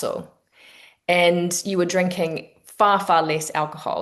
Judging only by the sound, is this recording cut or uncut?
uncut